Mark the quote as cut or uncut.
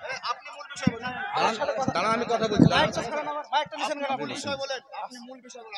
uncut